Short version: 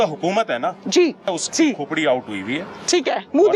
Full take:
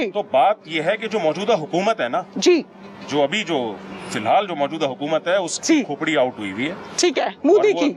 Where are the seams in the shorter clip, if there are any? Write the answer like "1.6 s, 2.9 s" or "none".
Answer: 1.3 s

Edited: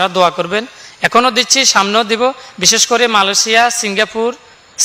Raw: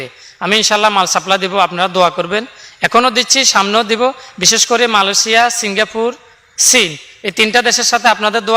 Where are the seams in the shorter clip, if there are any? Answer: none

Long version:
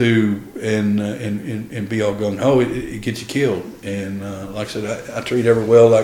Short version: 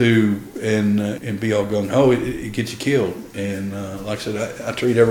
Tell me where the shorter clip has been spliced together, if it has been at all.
1.2 s

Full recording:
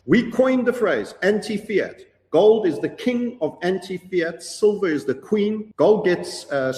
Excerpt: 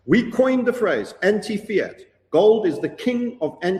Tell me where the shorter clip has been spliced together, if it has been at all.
none

